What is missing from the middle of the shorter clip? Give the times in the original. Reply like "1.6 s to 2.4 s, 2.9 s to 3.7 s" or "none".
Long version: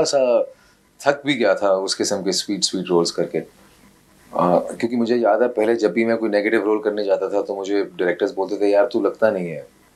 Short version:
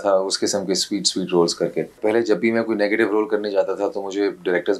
3.6 s to 5.5 s